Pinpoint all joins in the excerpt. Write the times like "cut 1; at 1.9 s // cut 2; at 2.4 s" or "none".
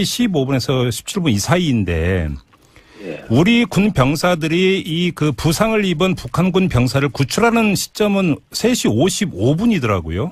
cut 1; at 5.2 s